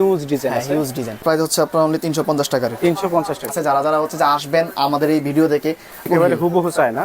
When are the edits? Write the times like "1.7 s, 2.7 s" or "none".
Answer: 1.2 s, 3.5 s, 6.1 s